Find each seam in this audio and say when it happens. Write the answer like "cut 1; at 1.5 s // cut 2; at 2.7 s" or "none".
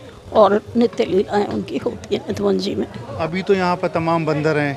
none